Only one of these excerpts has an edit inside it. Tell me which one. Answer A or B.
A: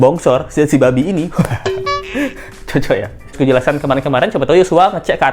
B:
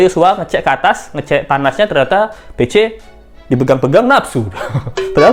A